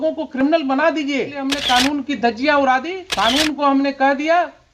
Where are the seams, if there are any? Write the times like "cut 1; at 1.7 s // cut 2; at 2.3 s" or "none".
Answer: cut 1; at 1.5 s // cut 2; at 3.0 s